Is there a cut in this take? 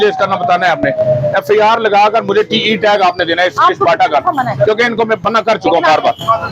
no; 0 cuts

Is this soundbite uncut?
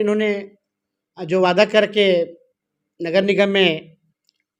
yes; 0 cuts

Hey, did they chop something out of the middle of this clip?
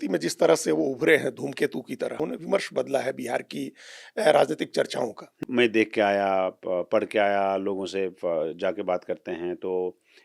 yes; 2 cuts; at 2.1 s, 5.4 s

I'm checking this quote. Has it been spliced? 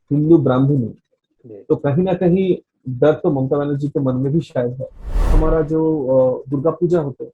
yes; 1 cut; at 5.2 s

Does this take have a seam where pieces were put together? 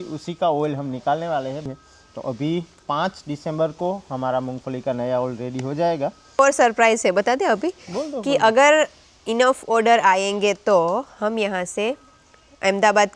yes; 2 cuts; at 1.6 s, 6.4 s

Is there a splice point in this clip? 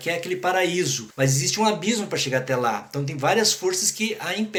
no; 0 cuts

